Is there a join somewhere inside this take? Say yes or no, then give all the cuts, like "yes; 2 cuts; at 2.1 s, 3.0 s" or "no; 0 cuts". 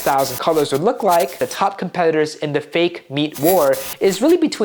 yes; 1 cut; at 1.4 s